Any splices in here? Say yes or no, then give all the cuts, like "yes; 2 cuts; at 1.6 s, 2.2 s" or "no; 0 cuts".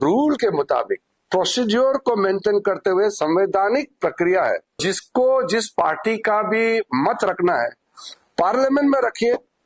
yes; 1 cut; at 4.8 s